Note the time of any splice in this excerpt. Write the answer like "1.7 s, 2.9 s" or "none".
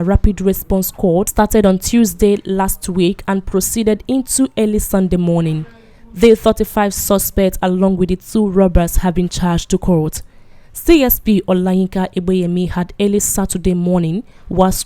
1.3 s